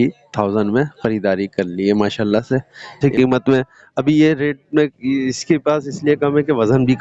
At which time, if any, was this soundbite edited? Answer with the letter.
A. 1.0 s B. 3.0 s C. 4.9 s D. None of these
B